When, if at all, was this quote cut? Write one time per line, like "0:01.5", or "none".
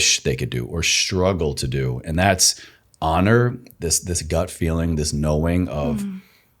none